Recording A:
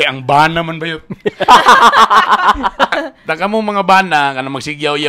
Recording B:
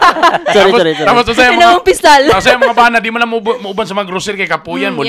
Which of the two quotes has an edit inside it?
A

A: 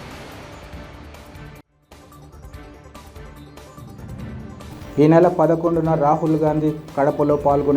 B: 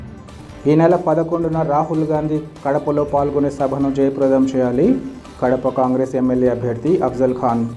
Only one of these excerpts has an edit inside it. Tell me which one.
A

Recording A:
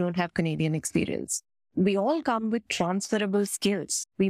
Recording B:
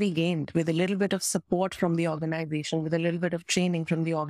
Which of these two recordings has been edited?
A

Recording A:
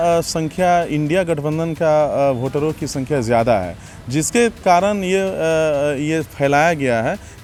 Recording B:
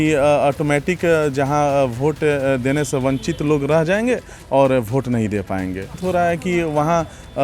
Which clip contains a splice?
B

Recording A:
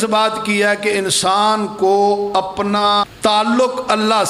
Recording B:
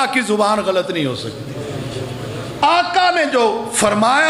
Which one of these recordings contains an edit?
A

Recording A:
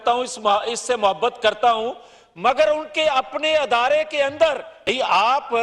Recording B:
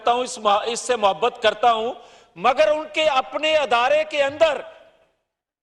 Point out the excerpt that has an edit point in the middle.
A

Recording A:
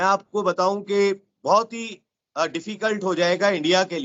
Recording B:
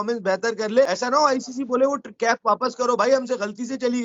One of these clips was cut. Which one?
B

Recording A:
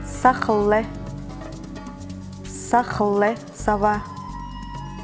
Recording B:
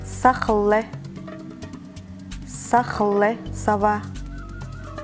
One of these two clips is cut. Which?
B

